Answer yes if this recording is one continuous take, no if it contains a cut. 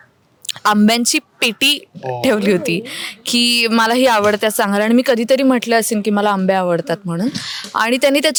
yes